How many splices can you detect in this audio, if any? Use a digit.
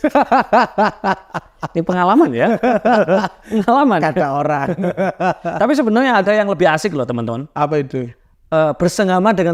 0